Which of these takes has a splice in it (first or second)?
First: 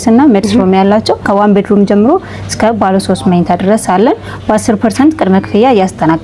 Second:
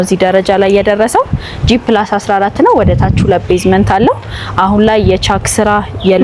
first